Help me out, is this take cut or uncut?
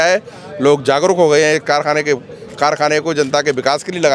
uncut